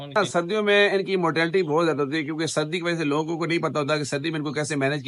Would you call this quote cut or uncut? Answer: uncut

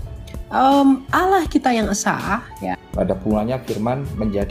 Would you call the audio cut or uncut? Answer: cut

